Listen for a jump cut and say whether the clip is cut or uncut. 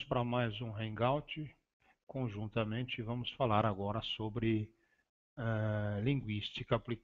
uncut